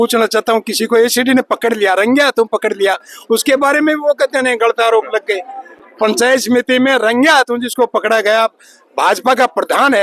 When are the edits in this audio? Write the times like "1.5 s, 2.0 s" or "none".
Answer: none